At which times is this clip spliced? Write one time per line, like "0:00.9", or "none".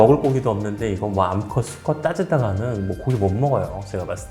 none